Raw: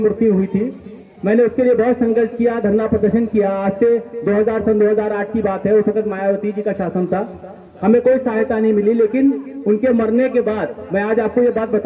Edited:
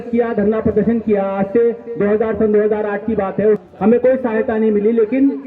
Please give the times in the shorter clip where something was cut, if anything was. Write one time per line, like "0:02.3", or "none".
0:03.6